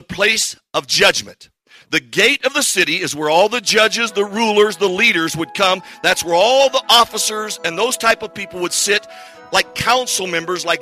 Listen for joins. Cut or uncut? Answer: uncut